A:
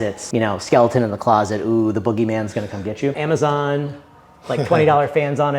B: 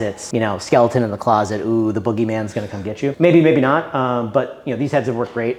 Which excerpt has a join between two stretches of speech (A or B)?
A